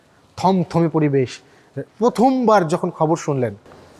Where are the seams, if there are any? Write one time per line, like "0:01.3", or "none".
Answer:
none